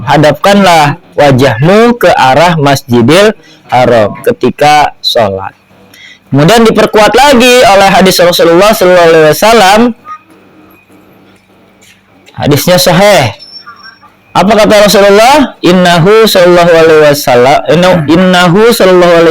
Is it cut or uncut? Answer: uncut